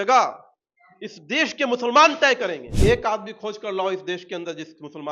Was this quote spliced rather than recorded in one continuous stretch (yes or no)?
yes